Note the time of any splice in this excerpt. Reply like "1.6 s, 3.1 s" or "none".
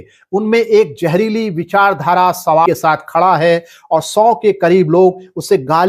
2.7 s

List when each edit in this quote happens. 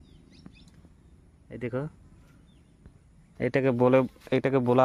3.3 s

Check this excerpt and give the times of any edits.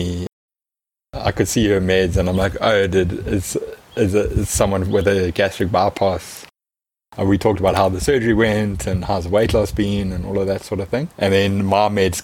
none

